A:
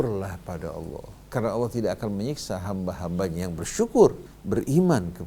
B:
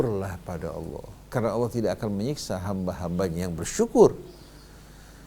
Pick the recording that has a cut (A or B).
A